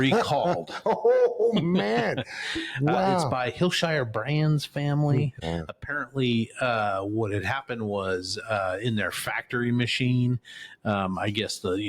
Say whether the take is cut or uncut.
cut